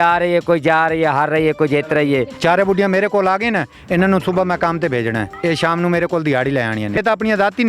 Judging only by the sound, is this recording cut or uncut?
cut